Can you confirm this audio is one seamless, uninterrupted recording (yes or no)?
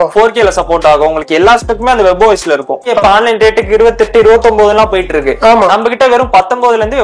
no